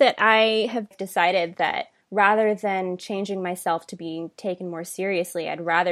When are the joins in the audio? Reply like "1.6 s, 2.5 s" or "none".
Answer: 0.9 s, 1.9 s